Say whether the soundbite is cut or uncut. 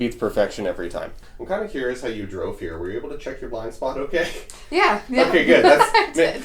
cut